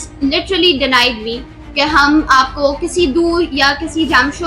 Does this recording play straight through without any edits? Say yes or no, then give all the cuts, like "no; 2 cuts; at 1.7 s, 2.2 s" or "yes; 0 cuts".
yes; 0 cuts